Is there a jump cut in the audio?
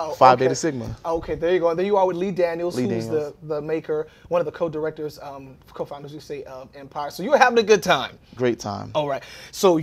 no; 0 cuts

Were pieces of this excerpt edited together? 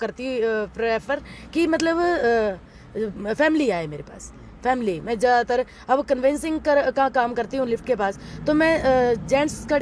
no; 0 cuts

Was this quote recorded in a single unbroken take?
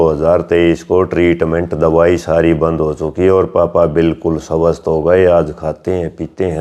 yes; 0 cuts

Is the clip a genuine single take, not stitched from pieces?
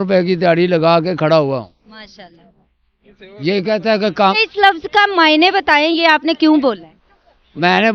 no; 1 cut; at 4.3 s

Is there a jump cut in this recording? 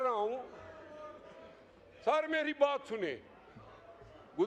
no; 0 cuts

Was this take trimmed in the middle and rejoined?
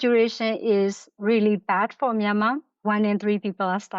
yes; 1 cut; at 2.8 s

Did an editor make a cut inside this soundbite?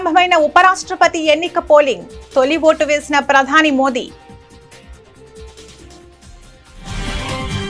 no; 0 cuts

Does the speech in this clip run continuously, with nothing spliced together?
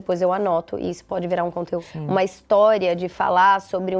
no; 1 cut; at 1.9 s

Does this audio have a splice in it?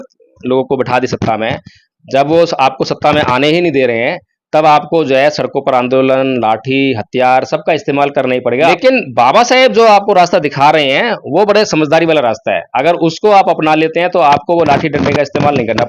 yes; 1 cut; at 8.8 s

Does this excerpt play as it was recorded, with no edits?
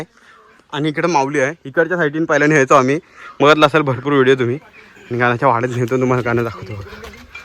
yes; 0 cuts

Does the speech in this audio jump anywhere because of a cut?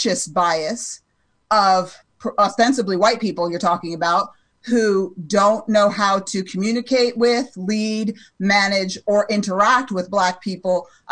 no; 0 cuts

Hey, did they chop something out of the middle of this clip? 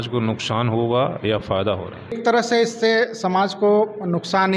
yes; 1 cut; at 2.2 s

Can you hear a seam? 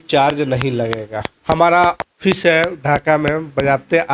yes; 1 cut; at 1.2 s

